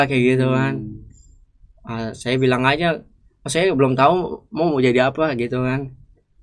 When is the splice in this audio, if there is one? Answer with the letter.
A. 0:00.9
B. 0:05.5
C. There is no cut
C